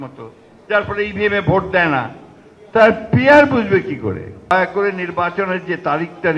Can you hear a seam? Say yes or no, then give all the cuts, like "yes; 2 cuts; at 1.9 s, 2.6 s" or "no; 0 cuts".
yes; 1 cut; at 4.5 s